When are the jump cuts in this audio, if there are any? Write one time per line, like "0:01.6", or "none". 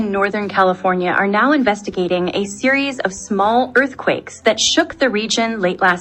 0:00.9